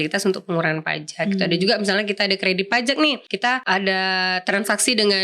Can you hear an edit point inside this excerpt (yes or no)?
yes